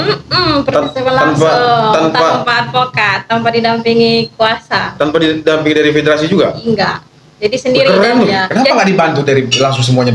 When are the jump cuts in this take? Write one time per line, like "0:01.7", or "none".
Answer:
0:08.4